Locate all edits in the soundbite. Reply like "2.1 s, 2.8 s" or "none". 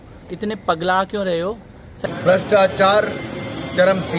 1.9 s